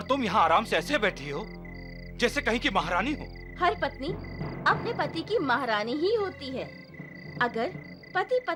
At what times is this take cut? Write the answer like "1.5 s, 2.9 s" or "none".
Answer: none